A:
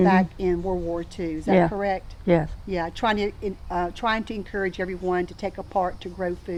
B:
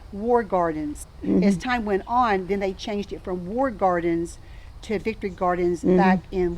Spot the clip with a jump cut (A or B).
B